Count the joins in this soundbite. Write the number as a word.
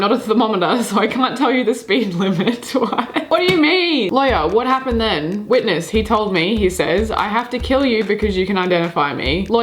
two